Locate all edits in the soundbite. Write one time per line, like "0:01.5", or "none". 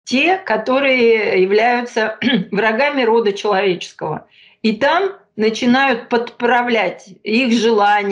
none